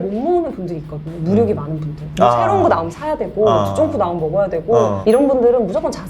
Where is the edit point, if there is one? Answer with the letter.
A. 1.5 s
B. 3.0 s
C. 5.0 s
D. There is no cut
C